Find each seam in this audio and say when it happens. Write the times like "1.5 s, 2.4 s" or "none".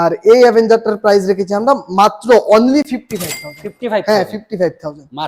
none